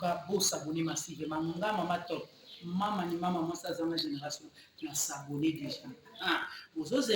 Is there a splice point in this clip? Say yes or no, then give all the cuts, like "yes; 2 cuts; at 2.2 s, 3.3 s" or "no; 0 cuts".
yes; 1 cut; at 2.1 s